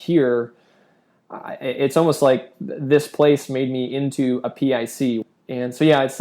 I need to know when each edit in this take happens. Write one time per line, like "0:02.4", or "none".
0:05.2